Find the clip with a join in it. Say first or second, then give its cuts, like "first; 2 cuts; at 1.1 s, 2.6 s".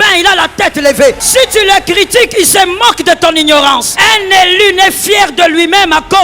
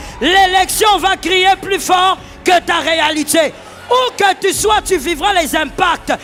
first; 2 cuts; at 1.2 s, 3.9 s